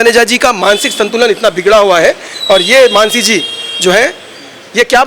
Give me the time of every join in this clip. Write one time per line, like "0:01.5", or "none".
0:02.3